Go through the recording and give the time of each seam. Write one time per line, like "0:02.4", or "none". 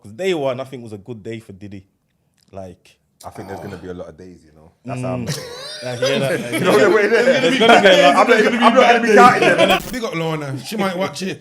0:09.8